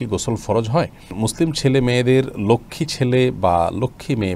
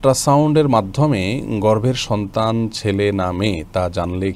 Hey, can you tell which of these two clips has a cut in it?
first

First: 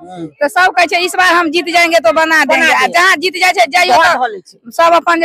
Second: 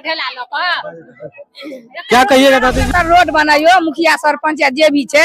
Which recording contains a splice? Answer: second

